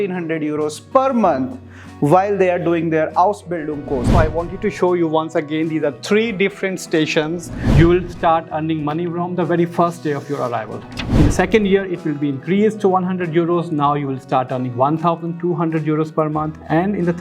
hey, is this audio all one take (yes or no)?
no